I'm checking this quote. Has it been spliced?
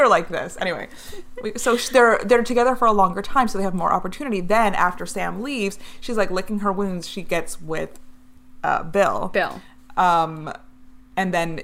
no; 0 cuts

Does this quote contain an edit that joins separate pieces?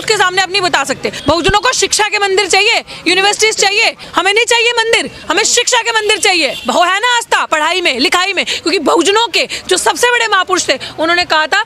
yes; 3 cuts; at 1.2 s, 4.0 s, 6.6 s

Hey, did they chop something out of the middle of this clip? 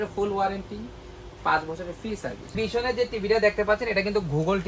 yes; 1 cut; at 2.5 s

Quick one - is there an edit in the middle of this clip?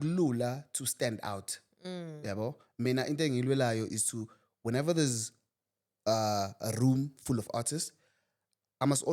no; 0 cuts

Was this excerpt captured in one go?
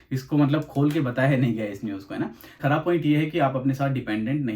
no; 1 cut; at 2.6 s

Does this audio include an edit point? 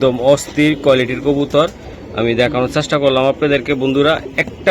no; 0 cuts

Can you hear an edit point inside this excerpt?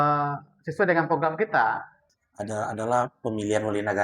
yes; 1 cut; at 2.0 s

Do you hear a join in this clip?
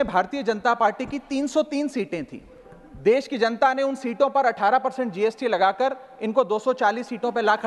no; 0 cuts

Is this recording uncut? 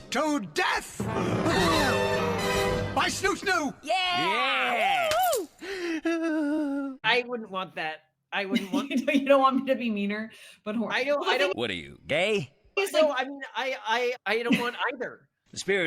yes; 0 cuts

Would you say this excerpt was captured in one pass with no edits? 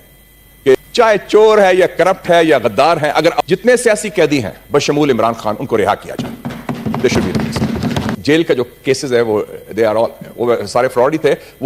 no; 3 cuts; at 0.8 s, 3.4 s, 8.1 s

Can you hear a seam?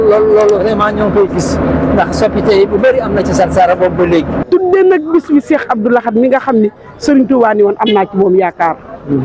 yes; 1 cut; at 4.5 s

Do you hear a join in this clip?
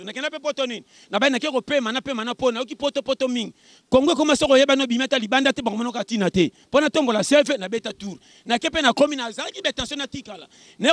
no; 0 cuts

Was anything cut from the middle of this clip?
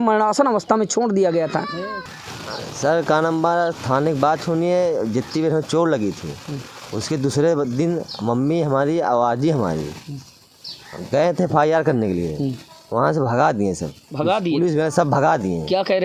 yes; 1 cut; at 1.9 s

